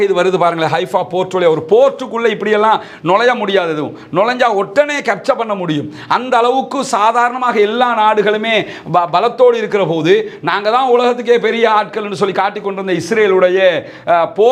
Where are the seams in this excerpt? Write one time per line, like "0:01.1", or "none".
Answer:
none